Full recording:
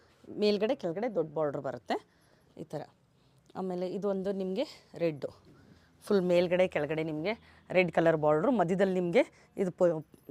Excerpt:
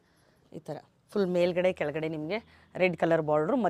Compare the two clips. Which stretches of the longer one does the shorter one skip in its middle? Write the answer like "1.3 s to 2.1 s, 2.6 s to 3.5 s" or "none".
3.0 s to 5.9 s